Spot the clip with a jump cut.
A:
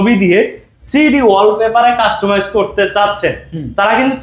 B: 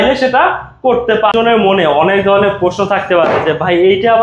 B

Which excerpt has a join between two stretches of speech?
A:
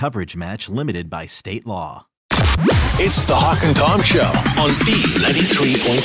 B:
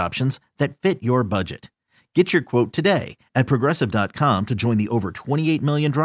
A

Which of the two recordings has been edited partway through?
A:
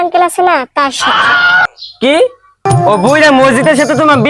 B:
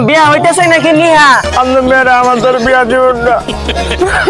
B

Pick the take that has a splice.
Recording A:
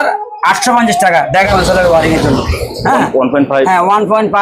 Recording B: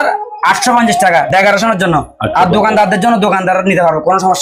A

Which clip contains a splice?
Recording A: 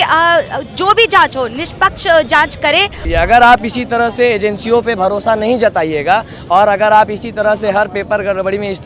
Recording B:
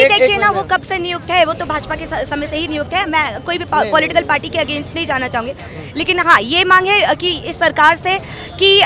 A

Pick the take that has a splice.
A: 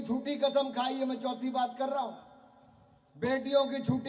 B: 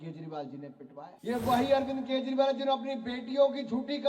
B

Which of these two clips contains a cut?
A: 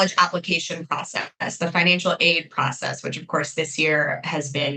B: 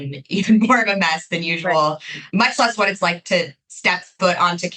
B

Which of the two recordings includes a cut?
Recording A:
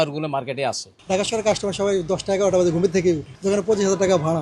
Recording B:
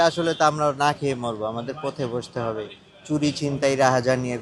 A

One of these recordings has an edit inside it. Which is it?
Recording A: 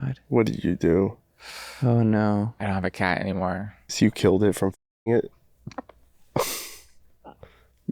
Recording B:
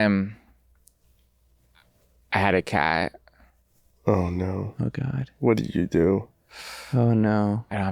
A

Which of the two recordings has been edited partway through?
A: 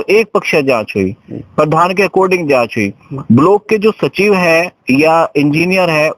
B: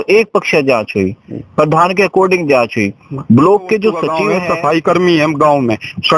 B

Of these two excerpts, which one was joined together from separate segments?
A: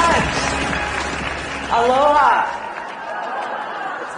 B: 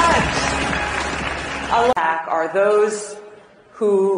A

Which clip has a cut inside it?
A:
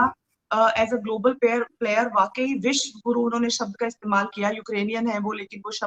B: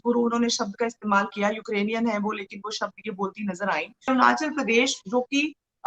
B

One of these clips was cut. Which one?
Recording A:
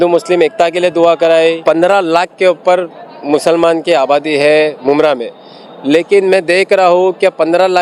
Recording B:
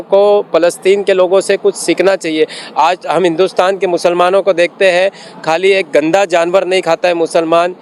A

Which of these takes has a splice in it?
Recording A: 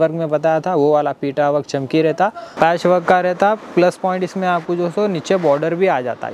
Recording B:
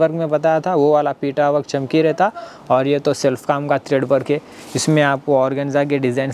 A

